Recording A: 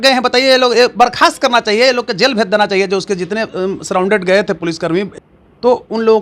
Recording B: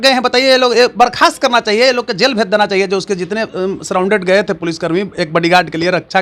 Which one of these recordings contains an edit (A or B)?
A